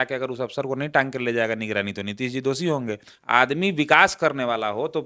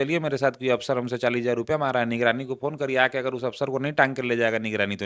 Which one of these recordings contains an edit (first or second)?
first